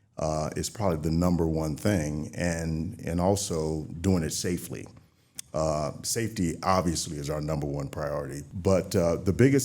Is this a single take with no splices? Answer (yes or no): no